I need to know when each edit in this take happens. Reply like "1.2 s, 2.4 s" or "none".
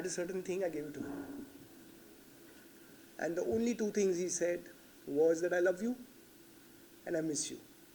none